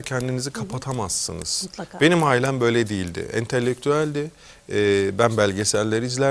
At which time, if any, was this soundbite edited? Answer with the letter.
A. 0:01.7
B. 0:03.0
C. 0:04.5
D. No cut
D